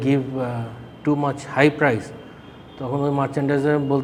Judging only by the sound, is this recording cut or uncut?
uncut